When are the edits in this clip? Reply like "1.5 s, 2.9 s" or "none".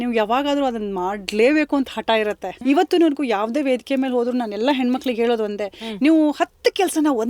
2.5 s